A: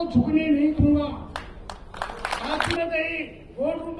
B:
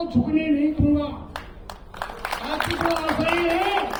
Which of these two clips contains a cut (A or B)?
A